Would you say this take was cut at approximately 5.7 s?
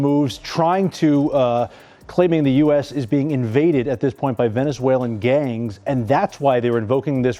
no; 0 cuts

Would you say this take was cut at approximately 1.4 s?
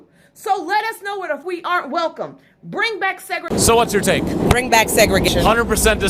yes; 3 cuts; at 1.4 s, 3.4 s, 5.3 s

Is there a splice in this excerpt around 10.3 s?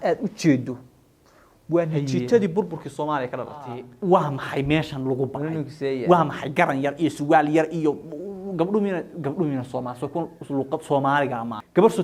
no; 1 cut; at 3.8 s

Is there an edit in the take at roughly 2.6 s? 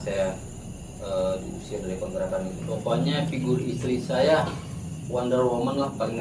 yes; 1 cut; at 2.6 s

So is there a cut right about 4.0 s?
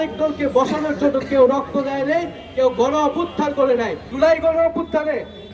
yes; 1 cut; at 4.0 s

